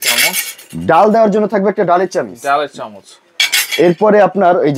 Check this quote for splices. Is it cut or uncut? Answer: uncut